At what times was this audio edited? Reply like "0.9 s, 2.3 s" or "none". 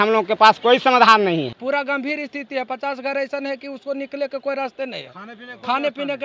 1.6 s